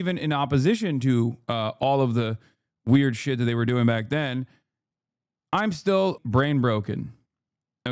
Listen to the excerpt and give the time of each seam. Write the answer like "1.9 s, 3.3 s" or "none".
6.2 s